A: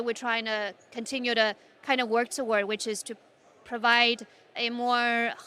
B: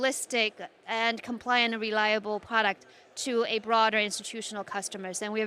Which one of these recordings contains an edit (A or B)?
A